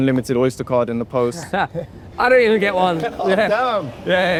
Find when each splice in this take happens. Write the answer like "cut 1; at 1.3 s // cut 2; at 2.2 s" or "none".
none